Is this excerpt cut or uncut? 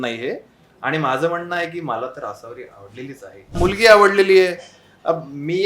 cut